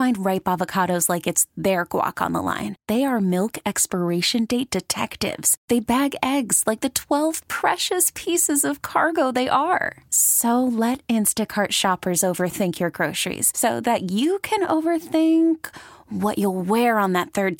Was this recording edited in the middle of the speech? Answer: no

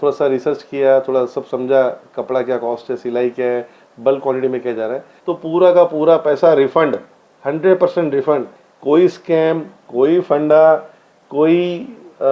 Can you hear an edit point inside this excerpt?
yes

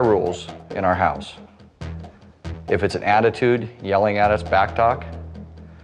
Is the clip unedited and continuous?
no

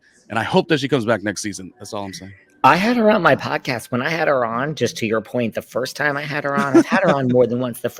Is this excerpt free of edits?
yes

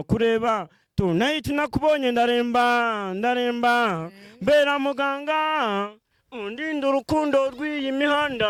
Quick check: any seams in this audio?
no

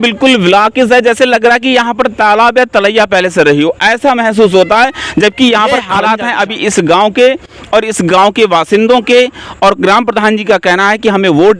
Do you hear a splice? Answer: yes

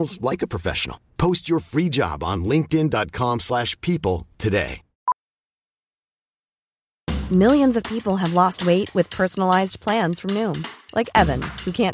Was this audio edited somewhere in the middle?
yes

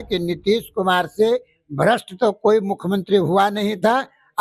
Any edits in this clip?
no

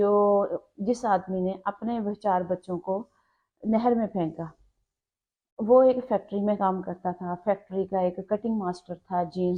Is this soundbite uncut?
yes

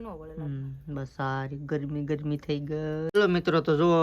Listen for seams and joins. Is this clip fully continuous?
no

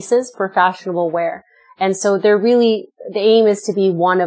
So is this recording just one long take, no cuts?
yes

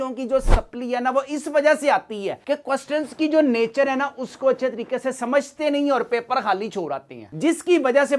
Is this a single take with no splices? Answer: yes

